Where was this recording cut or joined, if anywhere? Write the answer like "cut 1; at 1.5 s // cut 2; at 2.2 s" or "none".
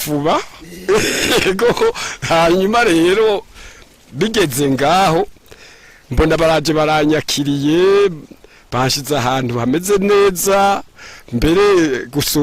none